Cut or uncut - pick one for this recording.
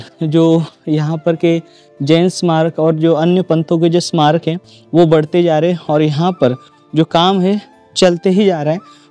uncut